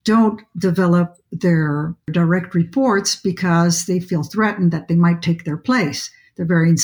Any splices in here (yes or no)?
yes